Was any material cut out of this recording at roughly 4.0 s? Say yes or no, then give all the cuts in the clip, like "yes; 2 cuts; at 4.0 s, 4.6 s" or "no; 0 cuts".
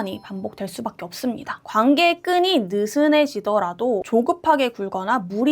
yes; 2 cuts; at 1.5 s, 4.0 s